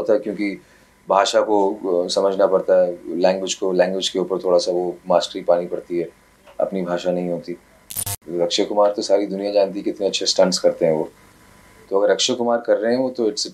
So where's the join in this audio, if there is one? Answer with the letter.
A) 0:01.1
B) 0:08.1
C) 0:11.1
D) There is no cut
B